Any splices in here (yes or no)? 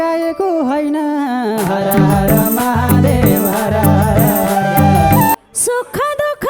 yes